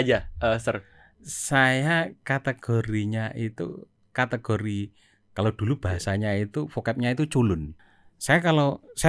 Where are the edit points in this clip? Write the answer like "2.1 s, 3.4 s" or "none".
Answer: 7.8 s